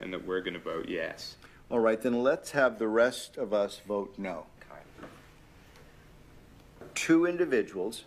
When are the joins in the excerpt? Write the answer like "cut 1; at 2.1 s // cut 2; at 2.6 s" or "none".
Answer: cut 1; at 7.0 s